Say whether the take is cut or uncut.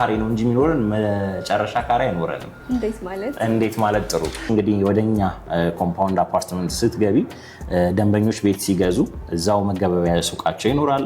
cut